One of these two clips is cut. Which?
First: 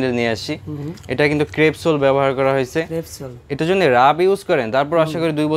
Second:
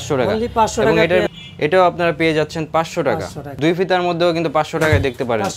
second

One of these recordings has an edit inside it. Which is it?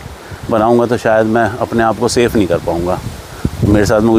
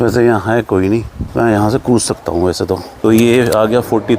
second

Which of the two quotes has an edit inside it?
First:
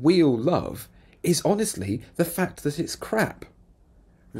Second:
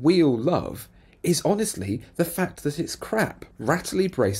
second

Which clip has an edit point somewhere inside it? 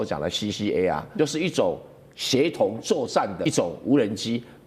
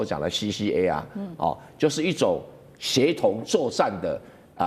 first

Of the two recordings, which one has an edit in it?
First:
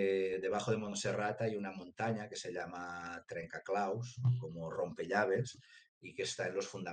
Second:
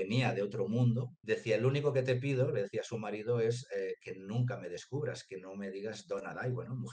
second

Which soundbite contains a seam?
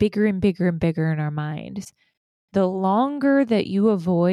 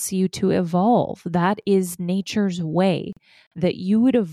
first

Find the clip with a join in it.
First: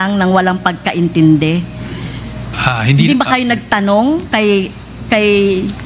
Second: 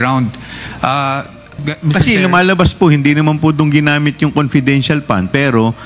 second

